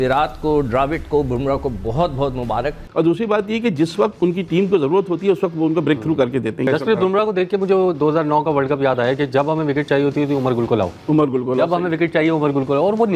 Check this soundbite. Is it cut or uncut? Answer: cut